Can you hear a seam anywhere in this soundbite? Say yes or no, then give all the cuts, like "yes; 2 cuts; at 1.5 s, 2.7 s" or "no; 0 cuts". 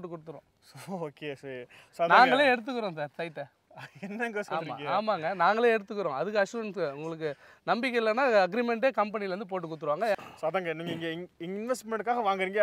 yes; 1 cut; at 10.1 s